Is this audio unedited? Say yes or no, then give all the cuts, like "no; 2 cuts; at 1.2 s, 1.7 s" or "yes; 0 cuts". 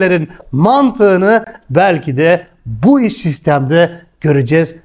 yes; 0 cuts